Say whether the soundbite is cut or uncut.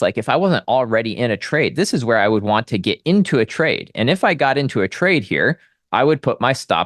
uncut